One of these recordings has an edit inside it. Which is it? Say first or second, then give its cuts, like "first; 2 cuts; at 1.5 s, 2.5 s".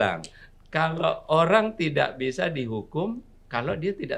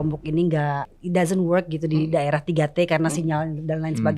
second; 1 cut; at 0.9 s